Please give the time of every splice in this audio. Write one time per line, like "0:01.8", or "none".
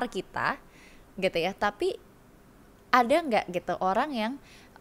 none